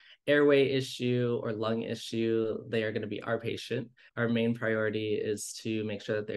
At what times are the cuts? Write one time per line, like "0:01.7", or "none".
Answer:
0:04.0